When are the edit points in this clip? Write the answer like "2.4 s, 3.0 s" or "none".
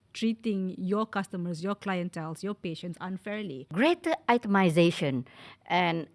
3.7 s